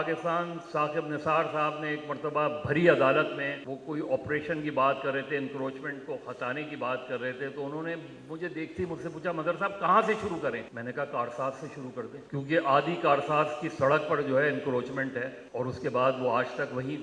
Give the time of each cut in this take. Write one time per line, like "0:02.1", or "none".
0:03.6
0:10.7
0:12.2
0:15.4